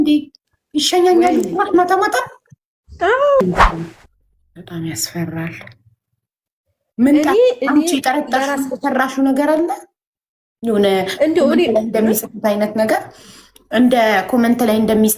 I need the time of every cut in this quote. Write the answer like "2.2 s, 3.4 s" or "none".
3.4 s